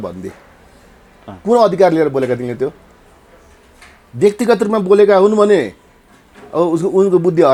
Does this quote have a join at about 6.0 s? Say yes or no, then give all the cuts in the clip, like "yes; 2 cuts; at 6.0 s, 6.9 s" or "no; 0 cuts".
no; 0 cuts